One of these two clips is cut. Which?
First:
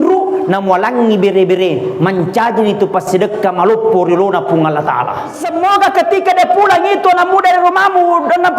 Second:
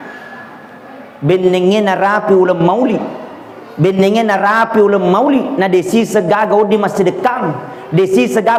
first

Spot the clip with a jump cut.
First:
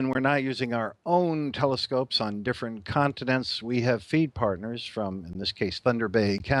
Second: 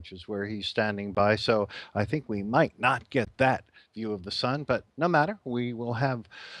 second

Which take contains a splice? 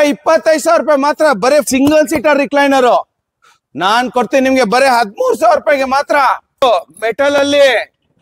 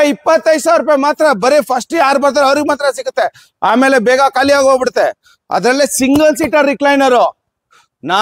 first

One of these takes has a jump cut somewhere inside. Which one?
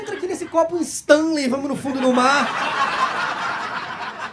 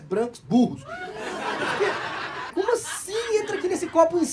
second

